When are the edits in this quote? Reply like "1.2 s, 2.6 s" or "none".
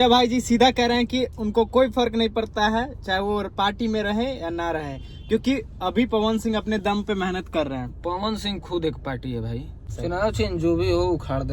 9.9 s